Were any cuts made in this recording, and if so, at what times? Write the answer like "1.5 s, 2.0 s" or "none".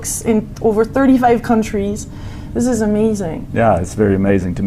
none